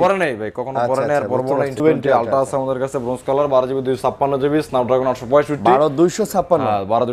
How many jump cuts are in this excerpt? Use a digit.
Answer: 1